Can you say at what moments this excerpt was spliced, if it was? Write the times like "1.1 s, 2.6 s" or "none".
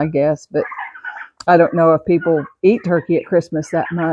none